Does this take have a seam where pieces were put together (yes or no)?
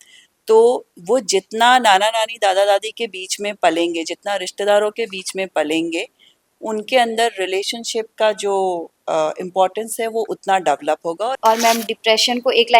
yes